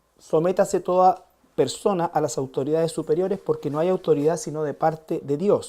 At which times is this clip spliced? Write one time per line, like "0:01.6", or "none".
none

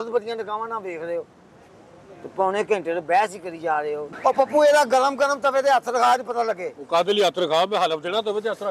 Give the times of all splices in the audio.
0:04.0

